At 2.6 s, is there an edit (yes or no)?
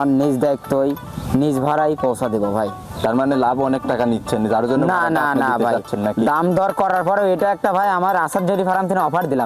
no